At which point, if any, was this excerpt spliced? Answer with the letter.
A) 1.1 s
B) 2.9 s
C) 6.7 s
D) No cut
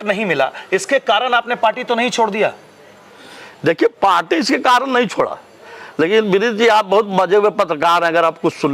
D